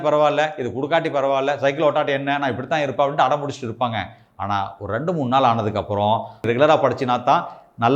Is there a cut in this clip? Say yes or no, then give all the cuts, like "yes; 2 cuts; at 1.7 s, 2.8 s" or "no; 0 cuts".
yes; 1 cut; at 6.4 s